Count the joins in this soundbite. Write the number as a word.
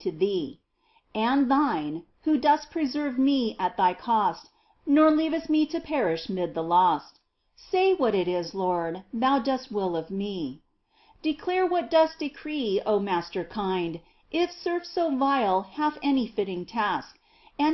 one